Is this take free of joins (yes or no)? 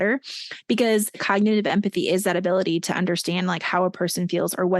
no